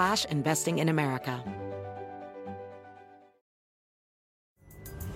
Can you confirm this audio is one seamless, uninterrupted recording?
no; 1 cut; at 1.4 s

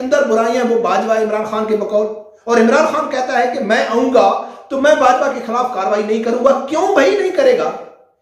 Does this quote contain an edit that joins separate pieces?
no; 0 cuts

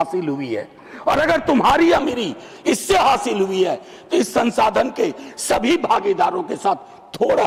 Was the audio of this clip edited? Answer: no; 0 cuts

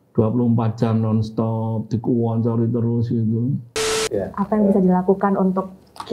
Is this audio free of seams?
no; 1 cut; at 3.8 s

